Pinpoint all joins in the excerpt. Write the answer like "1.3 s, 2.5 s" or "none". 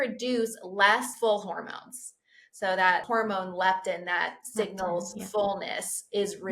1.1 s, 3.0 s